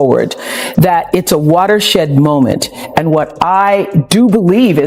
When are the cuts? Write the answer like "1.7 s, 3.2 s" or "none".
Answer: none